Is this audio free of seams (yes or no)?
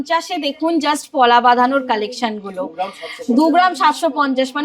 yes